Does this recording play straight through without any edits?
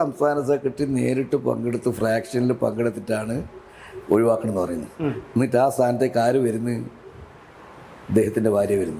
yes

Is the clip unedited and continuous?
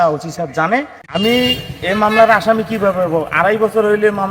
no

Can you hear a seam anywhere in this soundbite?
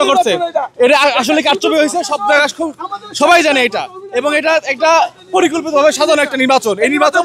no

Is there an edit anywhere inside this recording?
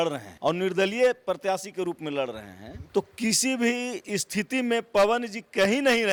no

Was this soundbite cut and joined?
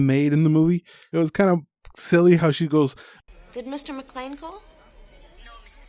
yes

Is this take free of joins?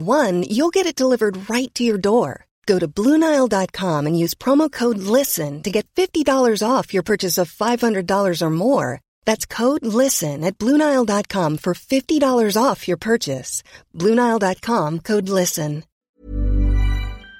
no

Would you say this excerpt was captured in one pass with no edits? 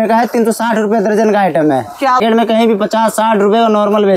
no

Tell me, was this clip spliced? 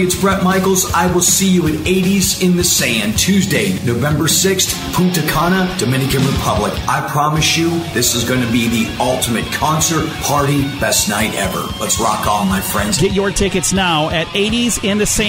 no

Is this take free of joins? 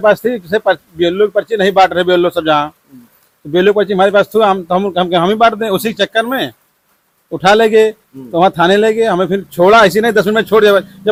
yes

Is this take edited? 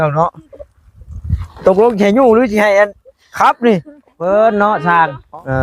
yes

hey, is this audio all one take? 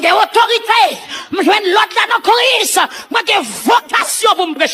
yes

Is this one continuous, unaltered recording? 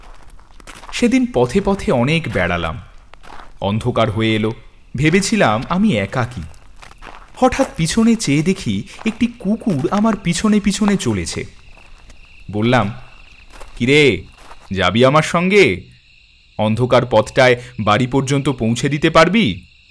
no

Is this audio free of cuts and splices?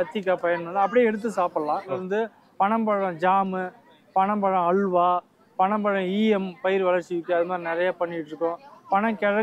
no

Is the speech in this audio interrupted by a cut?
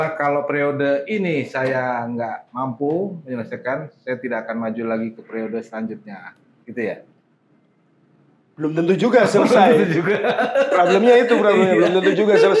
no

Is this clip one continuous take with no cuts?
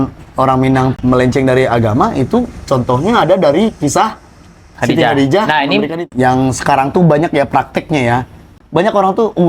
no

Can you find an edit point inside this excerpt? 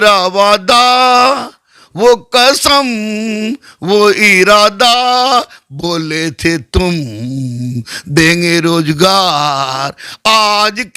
no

